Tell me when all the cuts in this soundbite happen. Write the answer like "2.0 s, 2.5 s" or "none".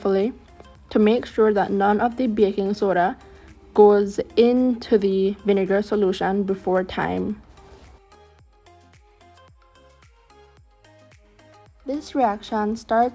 7.5 s, 11.8 s